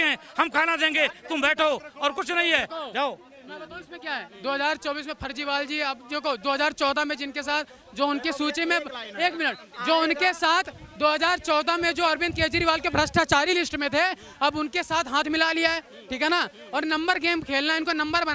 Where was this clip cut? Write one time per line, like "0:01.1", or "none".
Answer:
none